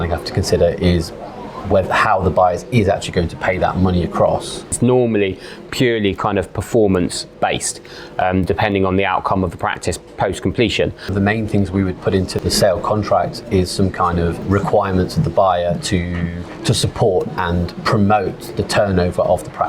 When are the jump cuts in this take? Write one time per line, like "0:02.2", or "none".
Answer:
0:04.8
0:11.1
0:12.4
0:14.4
0:18.5